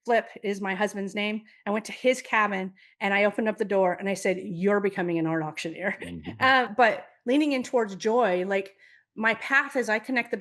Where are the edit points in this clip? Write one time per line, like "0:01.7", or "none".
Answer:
0:06.7